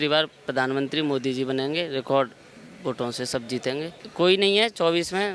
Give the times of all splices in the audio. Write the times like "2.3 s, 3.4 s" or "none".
4.1 s